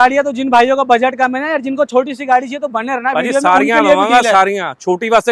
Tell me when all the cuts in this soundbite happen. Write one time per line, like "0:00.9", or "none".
none